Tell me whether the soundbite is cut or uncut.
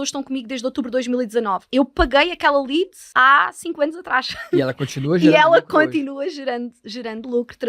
cut